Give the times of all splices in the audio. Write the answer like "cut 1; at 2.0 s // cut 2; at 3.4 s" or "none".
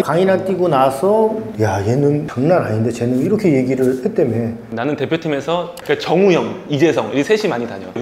cut 1; at 4.7 s